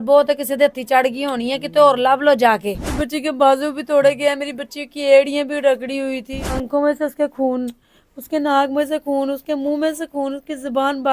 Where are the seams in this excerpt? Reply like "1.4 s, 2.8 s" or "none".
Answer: 3.0 s, 6.6 s